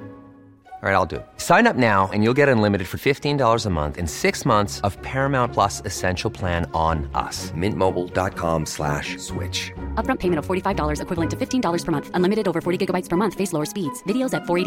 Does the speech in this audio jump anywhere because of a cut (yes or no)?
no